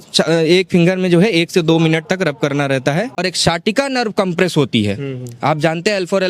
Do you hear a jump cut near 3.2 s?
yes; 1 cut; at 3.2 s

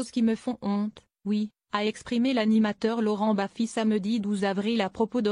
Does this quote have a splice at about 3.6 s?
no; 1 cut; at 1.0 s

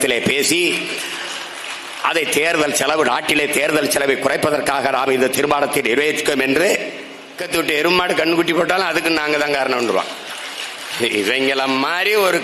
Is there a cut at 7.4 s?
yes; 1 cut; at 7.4 s

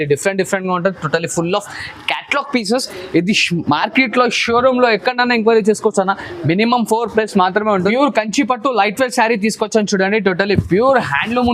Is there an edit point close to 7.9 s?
yes; 1 cut; at 7.9 s

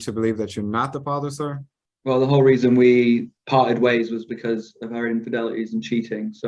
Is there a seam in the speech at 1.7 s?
no; 0 cuts

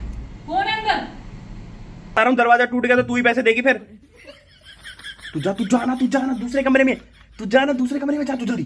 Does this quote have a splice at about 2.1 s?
yes; 1 cut; at 2.1 s

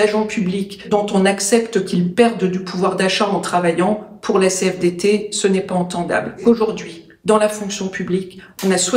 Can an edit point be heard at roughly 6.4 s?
yes; 2 cuts; at 0.8 s, 6.4 s

